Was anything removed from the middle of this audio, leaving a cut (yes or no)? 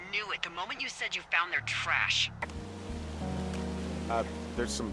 yes